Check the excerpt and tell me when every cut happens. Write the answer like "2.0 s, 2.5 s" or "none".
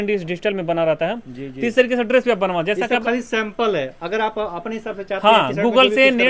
none